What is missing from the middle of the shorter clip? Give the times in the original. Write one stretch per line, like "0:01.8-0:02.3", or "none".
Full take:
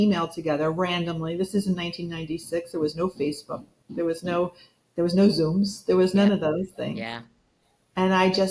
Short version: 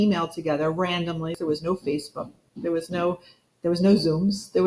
0:01.3-0:02.7